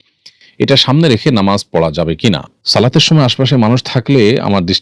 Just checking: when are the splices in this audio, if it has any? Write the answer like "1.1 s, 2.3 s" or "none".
2.5 s